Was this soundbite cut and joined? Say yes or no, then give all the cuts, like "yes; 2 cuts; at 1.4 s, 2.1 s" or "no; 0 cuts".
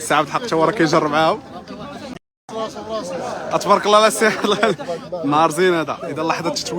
yes; 1 cut; at 2.1 s